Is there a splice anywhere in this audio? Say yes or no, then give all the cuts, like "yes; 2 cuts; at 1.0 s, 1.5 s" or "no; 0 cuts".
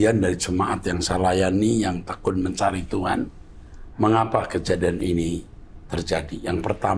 no; 0 cuts